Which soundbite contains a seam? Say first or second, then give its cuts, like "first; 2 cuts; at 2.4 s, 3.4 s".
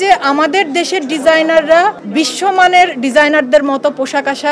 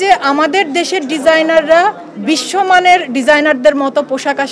first; 1 cut; at 2.0 s